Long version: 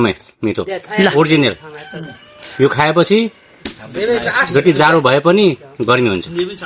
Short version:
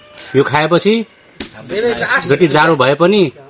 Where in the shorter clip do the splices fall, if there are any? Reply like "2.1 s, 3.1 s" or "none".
none